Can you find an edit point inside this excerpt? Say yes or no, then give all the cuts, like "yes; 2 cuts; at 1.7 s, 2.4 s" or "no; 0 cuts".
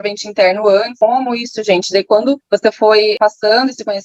yes; 2 cuts; at 0.9 s, 3.2 s